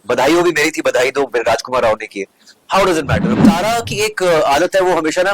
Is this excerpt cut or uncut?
cut